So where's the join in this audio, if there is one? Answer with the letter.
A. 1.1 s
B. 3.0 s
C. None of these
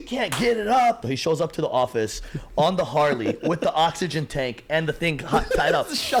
A